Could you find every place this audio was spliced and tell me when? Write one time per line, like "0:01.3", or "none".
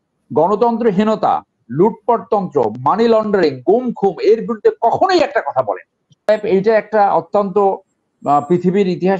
0:06.3